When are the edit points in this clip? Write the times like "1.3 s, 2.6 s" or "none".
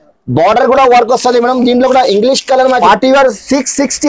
2.8 s